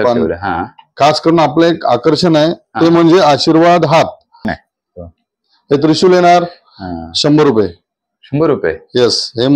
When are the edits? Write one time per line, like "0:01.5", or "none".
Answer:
0:04.5